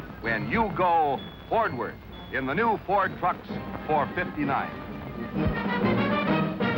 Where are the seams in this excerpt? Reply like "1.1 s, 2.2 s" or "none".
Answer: none